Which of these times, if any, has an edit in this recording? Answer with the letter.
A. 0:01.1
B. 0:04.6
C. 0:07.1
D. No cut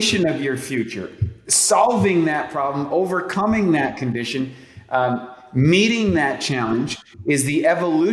D